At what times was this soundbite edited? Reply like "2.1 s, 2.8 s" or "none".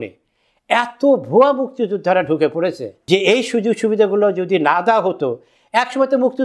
2.9 s

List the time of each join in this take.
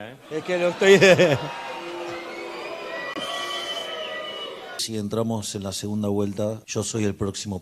4.8 s, 6.6 s

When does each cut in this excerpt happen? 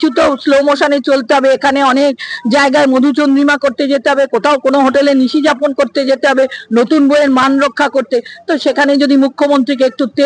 none

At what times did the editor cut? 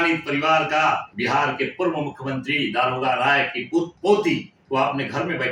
1.1 s, 3.9 s, 4.5 s

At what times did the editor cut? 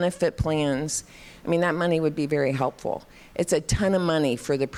none

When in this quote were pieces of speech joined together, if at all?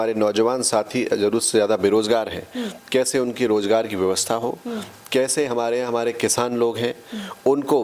none

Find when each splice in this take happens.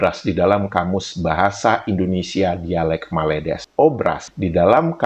3.8 s

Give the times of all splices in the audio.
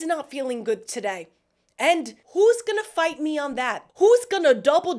2.2 s, 3.8 s

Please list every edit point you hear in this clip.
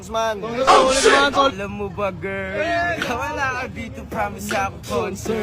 1.6 s

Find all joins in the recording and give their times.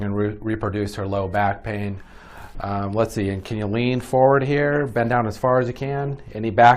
1.2 s

